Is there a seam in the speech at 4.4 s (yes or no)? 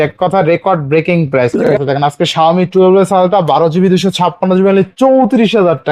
no